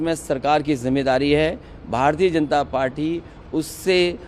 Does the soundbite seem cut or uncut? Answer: uncut